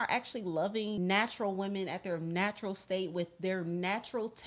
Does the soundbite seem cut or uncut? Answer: cut